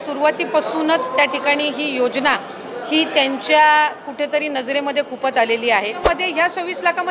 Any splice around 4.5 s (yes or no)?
no